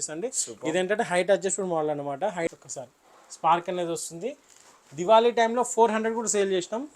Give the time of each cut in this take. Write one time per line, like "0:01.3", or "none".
0:02.5